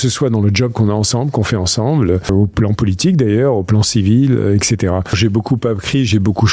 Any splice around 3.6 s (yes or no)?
no